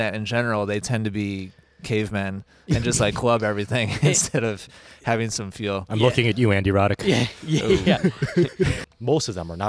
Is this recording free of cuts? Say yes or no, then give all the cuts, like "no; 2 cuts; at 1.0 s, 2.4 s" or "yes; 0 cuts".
no; 1 cut; at 8.8 s